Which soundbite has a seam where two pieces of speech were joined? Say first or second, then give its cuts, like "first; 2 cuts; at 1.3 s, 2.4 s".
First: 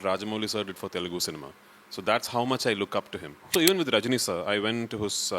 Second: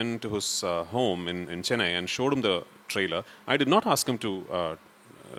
first; 1 cut; at 3.5 s